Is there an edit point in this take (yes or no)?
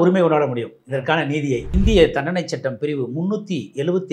yes